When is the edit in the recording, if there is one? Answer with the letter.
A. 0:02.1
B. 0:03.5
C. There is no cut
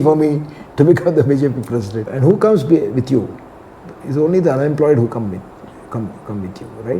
A